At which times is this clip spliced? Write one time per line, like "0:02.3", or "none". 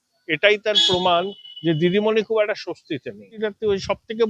0:03.3